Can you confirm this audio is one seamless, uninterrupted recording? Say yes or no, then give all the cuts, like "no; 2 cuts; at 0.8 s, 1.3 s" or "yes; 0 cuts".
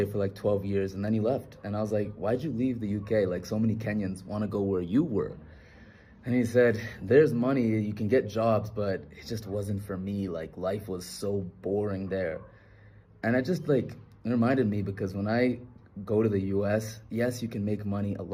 yes; 0 cuts